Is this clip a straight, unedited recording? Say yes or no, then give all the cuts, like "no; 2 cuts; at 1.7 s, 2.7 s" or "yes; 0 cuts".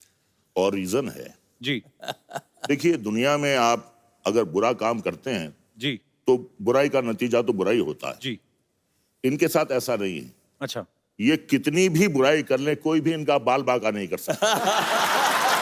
yes; 0 cuts